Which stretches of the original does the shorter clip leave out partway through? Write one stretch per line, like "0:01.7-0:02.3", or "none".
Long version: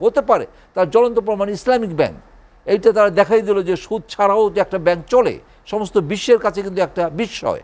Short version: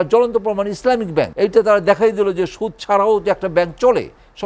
0:02.1-0:02.6